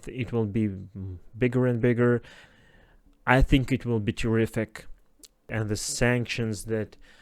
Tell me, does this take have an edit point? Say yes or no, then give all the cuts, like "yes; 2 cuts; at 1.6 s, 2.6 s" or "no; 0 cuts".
yes; 2 cuts; at 2.4 s, 5.5 s